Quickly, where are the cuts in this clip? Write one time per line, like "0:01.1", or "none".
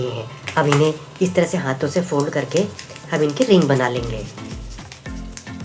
0:04.3

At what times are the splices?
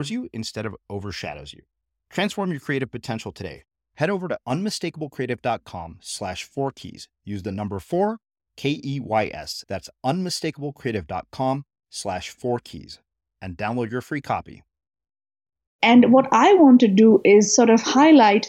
0:15.6

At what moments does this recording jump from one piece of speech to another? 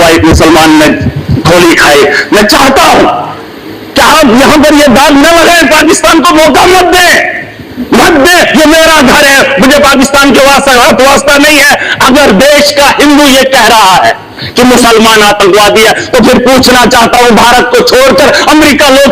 none

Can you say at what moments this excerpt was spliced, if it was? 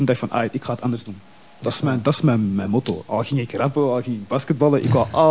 none

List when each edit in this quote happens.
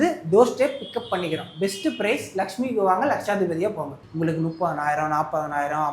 0:03.9

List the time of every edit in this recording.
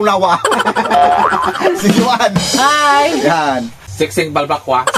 0:03.8

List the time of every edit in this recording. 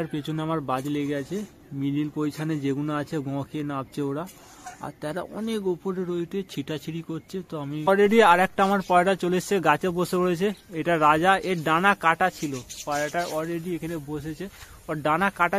0:07.8

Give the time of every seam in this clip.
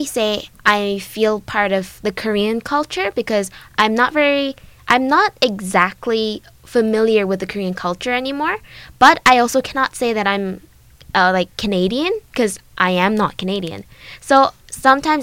none

